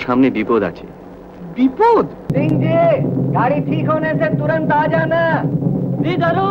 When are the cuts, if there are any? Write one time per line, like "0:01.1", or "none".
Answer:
0:02.3